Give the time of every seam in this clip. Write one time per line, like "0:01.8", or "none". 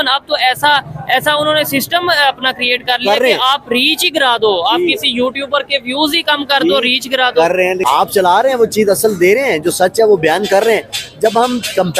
0:07.8